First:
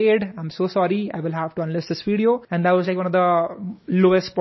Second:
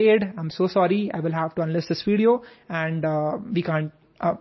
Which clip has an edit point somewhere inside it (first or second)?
first